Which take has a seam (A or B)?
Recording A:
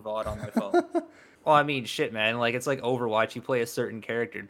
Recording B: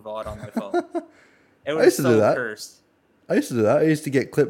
A